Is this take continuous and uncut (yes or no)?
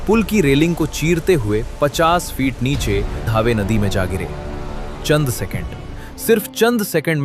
no